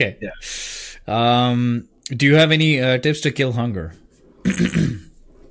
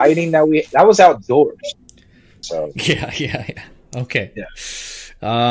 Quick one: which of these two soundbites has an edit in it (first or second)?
second